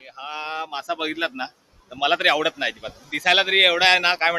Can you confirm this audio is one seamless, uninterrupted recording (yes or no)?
yes